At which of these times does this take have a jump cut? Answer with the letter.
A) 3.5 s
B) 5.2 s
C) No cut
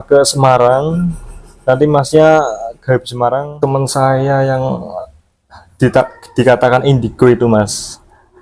A